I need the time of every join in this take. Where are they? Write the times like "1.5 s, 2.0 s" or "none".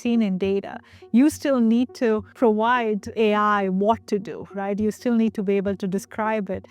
3.1 s